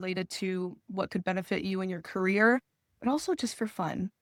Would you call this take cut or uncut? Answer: uncut